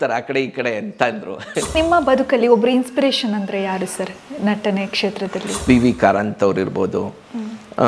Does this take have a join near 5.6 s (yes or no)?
yes